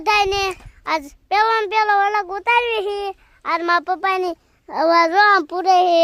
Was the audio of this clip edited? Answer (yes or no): no